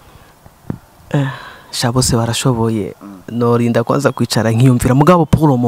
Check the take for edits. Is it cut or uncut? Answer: uncut